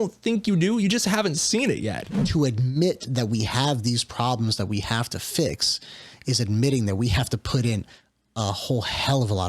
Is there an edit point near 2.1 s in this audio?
yes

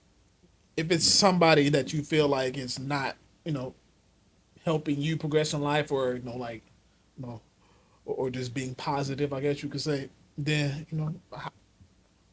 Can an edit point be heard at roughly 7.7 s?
no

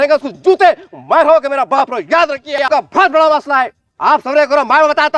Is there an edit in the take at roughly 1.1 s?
no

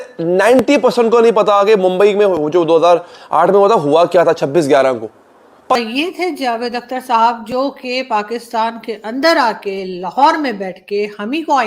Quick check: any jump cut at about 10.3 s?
no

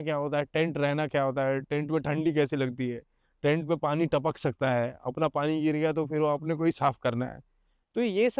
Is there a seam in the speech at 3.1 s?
no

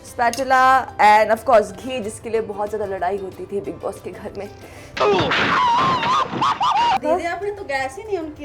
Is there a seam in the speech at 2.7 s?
no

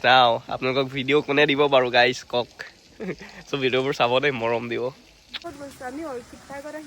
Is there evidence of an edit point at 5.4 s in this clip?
yes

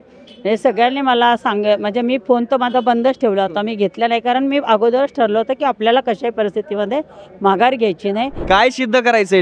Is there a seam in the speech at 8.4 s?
yes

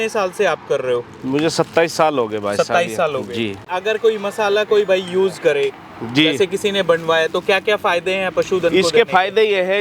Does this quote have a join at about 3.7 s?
yes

